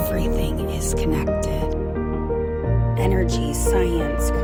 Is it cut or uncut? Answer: uncut